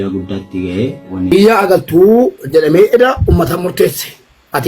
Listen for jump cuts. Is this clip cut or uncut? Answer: cut